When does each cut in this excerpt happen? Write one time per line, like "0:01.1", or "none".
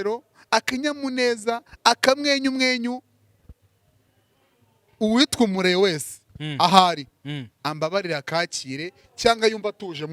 none